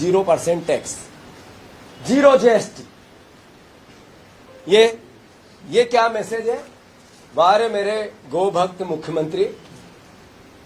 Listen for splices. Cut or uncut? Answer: uncut